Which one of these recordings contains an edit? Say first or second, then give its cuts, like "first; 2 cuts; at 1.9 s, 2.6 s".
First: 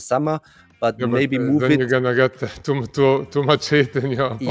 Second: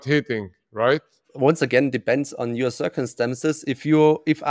second; 1 cut; at 1.2 s